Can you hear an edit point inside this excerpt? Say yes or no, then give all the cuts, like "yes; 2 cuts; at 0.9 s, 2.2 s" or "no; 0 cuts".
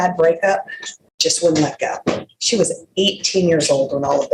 no; 0 cuts